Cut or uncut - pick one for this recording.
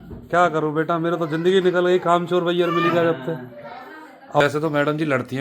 cut